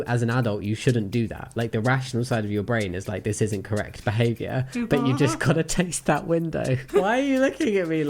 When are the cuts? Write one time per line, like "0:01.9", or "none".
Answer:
0:06.9